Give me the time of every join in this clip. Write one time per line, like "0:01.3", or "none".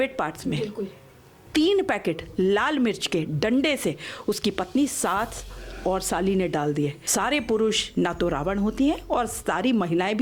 0:07.0